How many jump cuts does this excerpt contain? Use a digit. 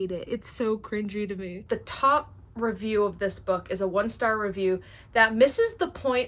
1